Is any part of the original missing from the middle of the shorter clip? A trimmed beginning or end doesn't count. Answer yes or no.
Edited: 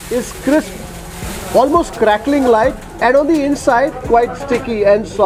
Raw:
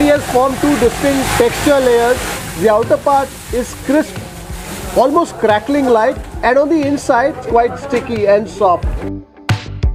no